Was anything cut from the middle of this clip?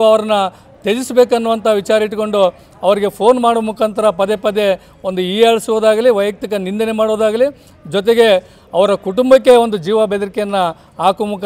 no; 0 cuts

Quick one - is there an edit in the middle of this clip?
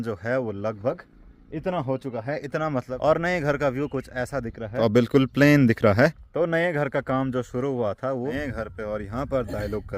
yes; 4 cuts; at 2.9 s, 4.7 s, 6.3 s, 8.3 s

